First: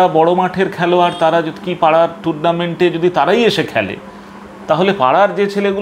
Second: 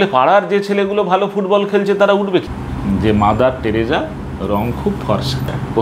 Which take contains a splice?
second; 1 cut; at 2.6 s

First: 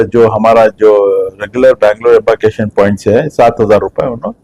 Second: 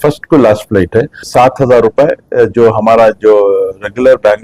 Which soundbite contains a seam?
second; 1 cut; at 1.3 s

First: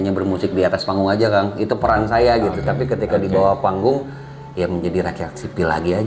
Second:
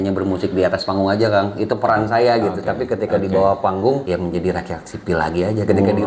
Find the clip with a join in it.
second; 1 cut; at 4.0 s

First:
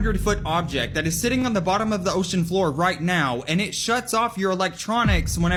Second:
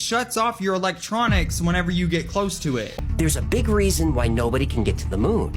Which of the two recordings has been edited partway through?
second; 1 cut; at 3.0 s

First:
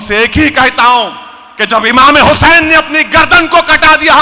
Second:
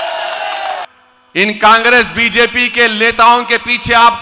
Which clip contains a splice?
second; 1 cut; at 0.9 s

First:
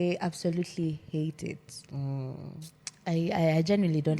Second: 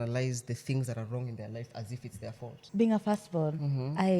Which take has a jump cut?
second; 1 cut; at 2.6 s

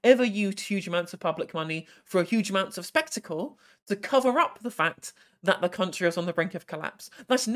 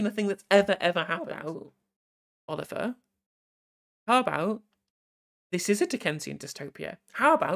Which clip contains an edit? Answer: second; 1 cut; at 1.4 s

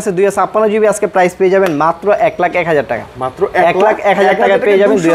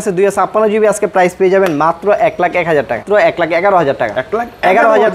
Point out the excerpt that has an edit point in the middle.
second; 1 cut; at 3.0 s

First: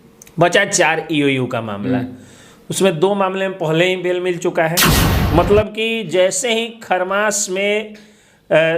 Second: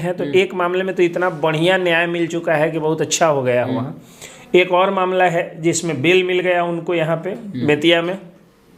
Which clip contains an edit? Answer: first; 1 cut; at 5.1 s

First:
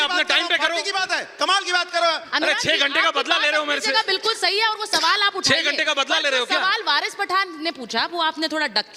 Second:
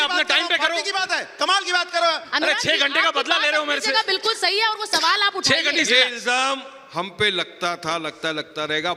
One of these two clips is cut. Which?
second; 1 cut; at 5.7 s

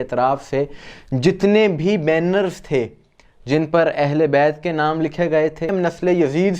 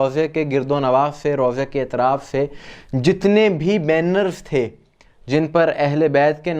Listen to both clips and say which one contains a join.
first; 1 cut; at 5.7 s

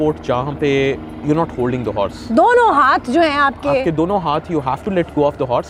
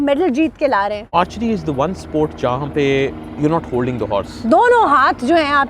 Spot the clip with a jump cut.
second; 1 cut; at 1.1 s

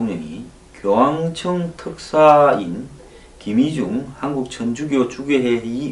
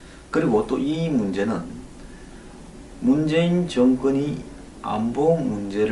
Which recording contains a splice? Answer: second; 1 cut; at 4.4 s

